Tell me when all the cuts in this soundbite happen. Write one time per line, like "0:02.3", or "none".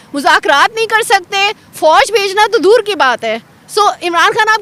none